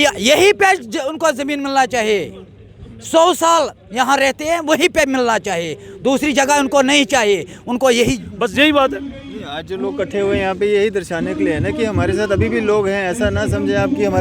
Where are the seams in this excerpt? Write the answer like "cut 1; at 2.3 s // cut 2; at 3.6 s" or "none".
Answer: cut 1; at 8.3 s